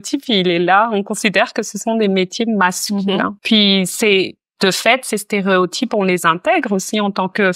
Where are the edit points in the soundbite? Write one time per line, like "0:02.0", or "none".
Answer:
none